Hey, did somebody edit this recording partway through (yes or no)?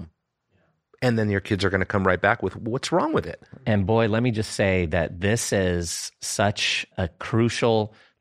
yes